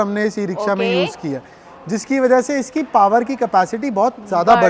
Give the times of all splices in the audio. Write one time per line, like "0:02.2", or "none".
none